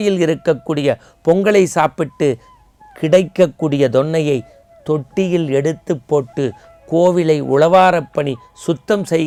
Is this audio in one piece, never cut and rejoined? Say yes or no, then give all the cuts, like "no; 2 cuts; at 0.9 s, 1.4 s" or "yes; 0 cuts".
yes; 0 cuts